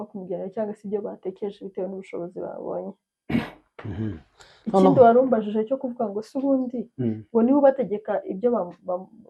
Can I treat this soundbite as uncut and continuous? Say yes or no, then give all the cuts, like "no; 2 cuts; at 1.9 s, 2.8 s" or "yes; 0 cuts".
yes; 0 cuts